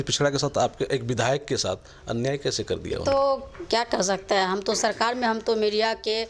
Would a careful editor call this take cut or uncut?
uncut